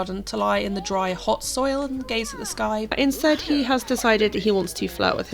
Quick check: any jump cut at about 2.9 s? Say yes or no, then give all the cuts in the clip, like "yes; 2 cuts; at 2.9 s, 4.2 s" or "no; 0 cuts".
yes; 1 cut; at 2.9 s